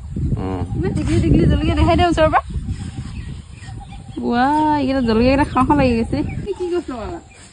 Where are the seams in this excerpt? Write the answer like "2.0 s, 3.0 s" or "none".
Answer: 6.5 s